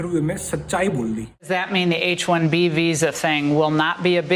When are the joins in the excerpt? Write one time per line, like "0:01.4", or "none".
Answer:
0:01.5